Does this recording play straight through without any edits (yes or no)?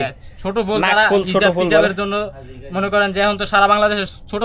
yes